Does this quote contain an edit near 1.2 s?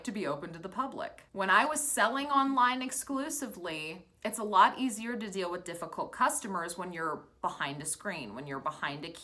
no; 0 cuts

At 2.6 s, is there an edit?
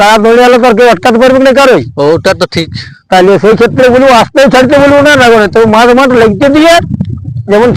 no; 0 cuts

